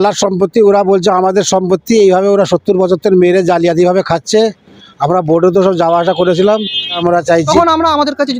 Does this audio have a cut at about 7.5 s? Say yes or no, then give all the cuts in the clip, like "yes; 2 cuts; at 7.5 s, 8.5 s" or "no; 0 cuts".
yes; 1 cut; at 7.5 s